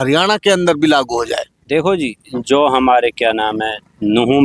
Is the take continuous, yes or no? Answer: yes